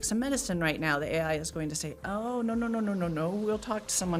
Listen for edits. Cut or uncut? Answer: uncut